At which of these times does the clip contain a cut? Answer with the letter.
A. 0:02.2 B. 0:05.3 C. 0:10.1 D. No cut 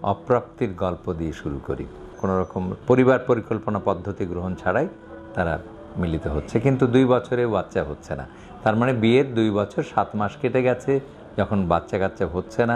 A